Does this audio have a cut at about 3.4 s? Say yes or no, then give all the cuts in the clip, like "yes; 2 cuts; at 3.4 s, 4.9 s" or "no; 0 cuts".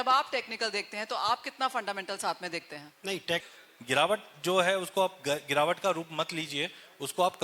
yes; 1 cut; at 3.4 s